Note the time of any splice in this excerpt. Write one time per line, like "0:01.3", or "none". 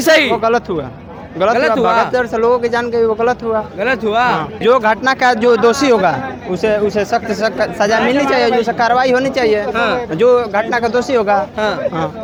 none